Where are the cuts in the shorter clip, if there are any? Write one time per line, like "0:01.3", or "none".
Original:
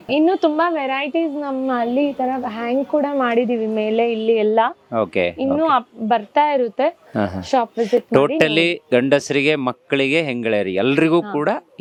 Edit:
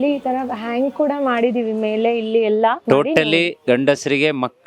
0:02.8